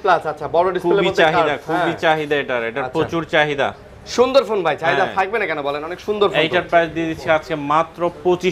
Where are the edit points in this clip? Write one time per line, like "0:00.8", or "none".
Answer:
none